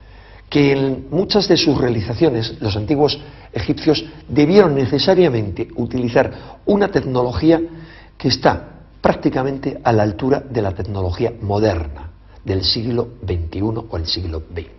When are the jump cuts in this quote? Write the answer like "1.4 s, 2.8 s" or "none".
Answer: 12.8 s